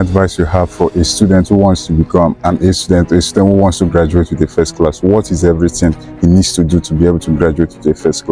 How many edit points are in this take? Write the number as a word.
one